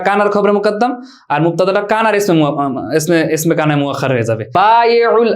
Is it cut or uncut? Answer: cut